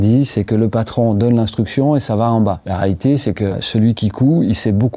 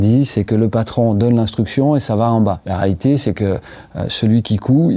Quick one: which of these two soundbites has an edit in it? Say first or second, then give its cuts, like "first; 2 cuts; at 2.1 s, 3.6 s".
first; 1 cut; at 3.6 s